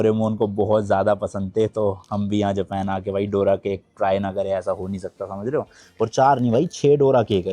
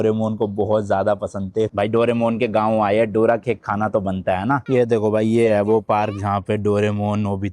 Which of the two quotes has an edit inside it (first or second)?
second